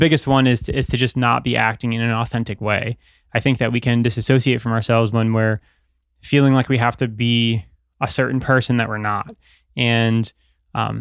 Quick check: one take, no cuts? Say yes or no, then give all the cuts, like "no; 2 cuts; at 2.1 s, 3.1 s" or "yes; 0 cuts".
yes; 0 cuts